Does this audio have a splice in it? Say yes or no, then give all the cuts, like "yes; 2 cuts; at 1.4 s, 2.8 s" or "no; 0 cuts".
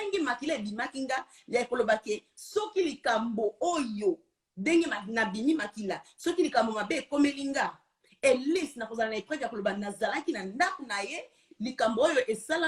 no; 0 cuts